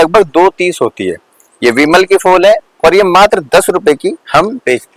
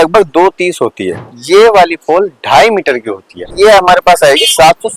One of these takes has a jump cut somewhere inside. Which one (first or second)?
second